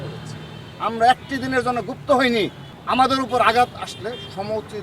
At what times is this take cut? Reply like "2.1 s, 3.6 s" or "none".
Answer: 2.6 s

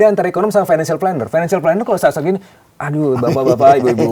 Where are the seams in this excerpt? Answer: none

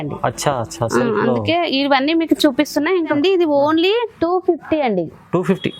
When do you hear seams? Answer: 3.2 s

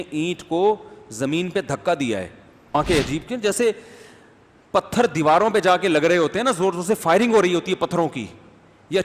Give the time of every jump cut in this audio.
2.7 s

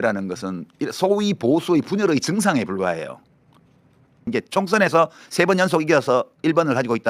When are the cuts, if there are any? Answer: 4.2 s

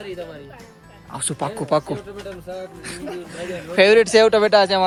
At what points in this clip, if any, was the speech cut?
none

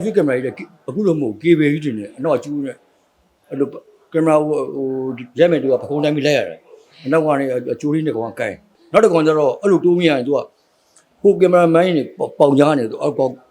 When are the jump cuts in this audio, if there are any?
8.7 s

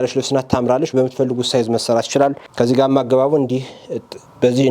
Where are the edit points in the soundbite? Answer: 2.4 s

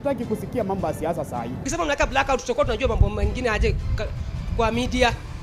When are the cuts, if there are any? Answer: 1.6 s

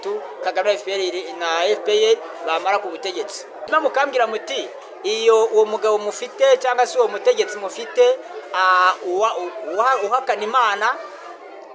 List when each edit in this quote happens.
3.7 s

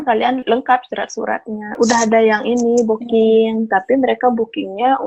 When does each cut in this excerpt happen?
1.8 s

